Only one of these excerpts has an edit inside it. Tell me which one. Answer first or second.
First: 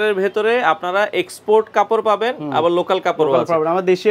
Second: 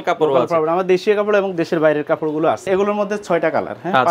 second